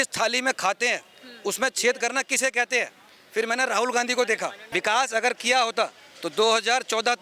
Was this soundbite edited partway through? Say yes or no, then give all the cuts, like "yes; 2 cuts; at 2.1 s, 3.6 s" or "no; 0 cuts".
yes; 1 cut; at 4.6 s